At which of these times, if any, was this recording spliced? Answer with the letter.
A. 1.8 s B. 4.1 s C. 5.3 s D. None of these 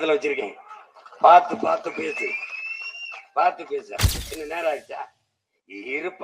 B